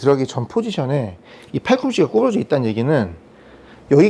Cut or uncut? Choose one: uncut